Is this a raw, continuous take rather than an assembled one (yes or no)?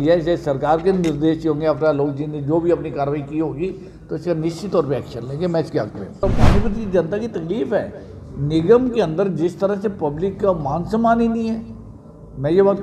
no